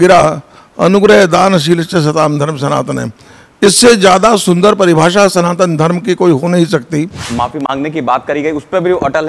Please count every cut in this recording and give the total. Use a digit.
1